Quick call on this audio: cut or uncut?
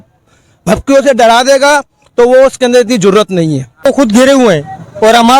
cut